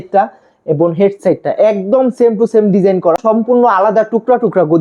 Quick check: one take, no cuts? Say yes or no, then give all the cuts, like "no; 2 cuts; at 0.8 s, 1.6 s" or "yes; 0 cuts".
no; 1 cut; at 3.2 s